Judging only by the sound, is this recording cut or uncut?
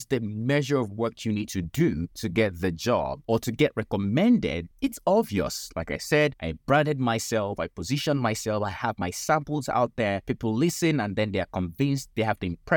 cut